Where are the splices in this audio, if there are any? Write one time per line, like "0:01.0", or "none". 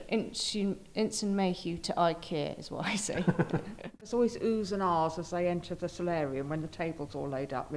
0:04.0